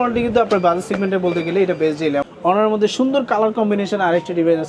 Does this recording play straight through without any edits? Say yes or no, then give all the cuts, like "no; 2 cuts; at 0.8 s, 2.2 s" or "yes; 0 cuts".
no; 1 cut; at 2.3 s